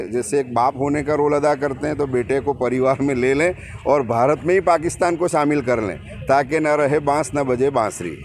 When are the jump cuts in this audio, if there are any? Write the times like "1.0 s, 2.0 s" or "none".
none